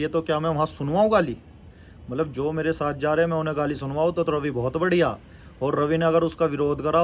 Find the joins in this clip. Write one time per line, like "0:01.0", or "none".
none